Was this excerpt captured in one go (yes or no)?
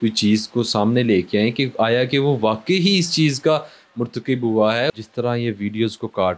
no